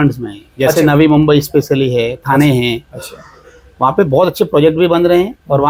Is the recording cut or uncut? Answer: uncut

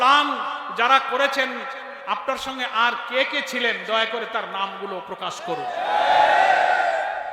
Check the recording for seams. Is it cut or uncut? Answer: uncut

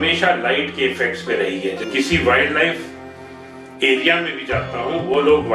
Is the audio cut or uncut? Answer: cut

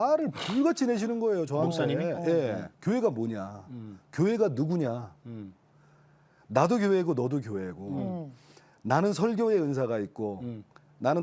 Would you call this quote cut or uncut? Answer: cut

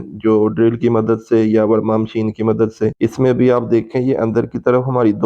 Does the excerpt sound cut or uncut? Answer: cut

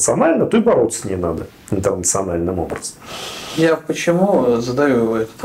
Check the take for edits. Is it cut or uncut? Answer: uncut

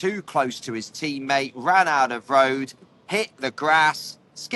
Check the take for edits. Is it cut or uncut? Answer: uncut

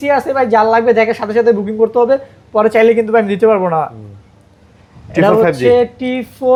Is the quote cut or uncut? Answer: uncut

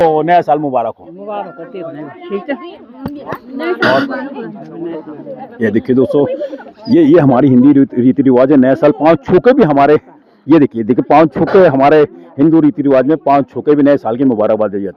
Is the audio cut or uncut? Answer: uncut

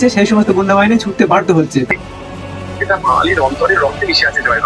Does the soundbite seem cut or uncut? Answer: cut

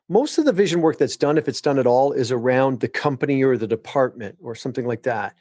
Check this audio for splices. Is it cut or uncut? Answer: uncut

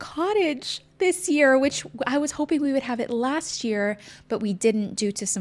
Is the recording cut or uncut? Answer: uncut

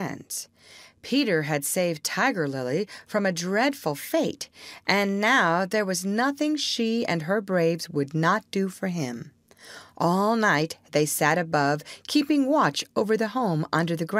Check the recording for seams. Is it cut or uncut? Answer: uncut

